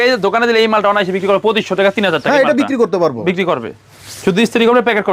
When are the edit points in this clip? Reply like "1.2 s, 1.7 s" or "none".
none